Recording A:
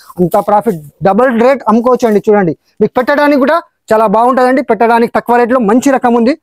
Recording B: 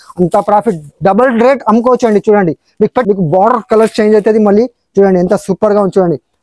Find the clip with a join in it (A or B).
B